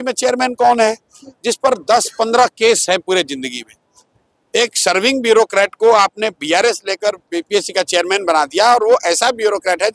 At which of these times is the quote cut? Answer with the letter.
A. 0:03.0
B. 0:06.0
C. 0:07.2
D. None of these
D